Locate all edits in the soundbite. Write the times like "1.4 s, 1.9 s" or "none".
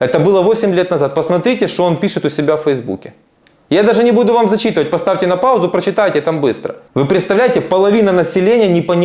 6.8 s